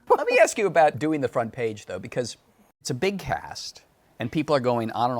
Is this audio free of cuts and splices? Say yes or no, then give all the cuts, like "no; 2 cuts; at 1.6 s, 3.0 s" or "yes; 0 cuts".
no; 2 cuts; at 0.9 s, 2.8 s